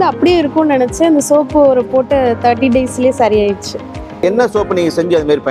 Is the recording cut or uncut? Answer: cut